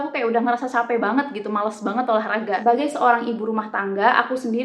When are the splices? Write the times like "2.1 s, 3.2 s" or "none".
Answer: 2.6 s